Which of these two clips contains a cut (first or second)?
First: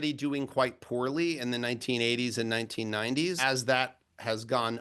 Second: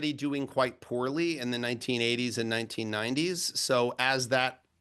first